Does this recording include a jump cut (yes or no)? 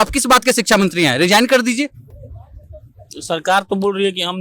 no